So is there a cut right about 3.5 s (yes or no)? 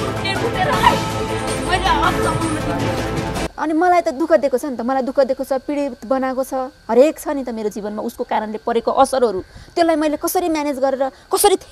yes